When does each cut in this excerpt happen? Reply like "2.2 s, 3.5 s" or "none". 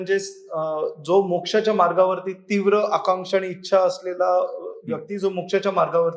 none